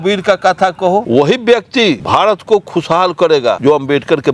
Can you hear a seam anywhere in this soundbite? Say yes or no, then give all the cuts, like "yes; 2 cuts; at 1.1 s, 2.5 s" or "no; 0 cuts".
yes; 3 cuts; at 1.1 s, 2.0 s, 3.6 s